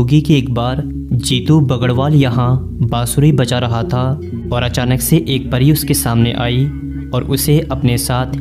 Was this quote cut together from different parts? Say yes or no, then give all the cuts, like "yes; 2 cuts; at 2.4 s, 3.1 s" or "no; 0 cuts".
no; 0 cuts